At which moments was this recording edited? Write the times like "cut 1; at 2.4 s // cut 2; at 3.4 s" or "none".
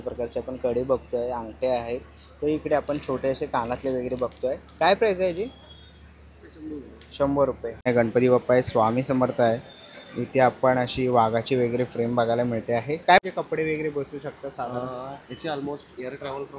cut 1; at 7.9 s // cut 2; at 13.2 s